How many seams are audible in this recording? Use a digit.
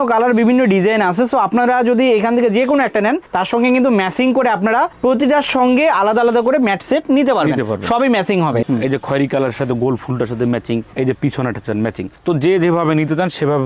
1